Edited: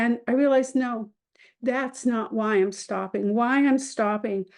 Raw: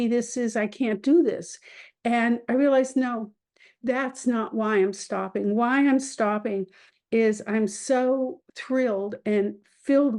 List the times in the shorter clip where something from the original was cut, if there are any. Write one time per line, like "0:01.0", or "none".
none